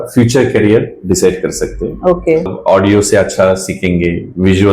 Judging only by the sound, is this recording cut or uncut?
cut